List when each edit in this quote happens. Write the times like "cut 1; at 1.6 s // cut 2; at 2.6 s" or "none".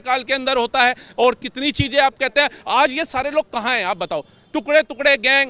none